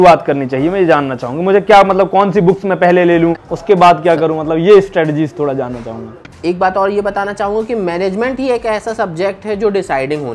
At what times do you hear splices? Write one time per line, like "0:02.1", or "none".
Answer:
0:03.5
0:06.2